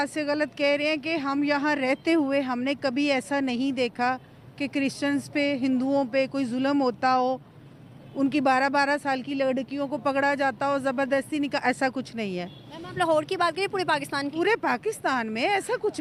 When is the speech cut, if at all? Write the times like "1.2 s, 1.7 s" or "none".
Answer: none